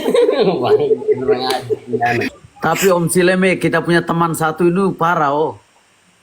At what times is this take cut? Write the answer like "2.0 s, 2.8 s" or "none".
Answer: 2.4 s